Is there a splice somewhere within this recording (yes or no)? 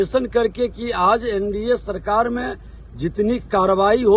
no